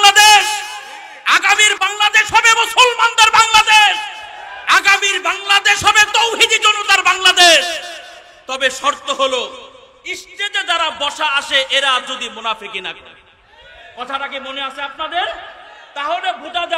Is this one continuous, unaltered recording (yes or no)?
no